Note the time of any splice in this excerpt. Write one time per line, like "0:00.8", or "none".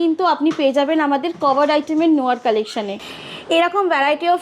0:03.1